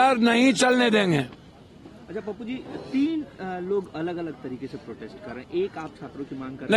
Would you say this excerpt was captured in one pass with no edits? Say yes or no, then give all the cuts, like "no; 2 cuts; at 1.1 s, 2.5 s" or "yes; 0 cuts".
yes; 0 cuts